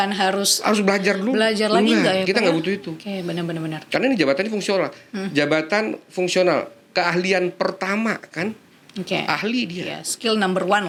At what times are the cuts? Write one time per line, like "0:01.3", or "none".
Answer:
none